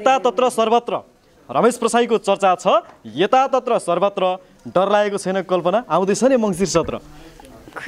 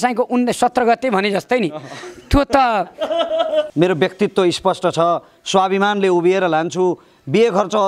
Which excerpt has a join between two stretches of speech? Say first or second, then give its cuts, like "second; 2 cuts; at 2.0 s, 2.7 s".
second; 1 cut; at 3.7 s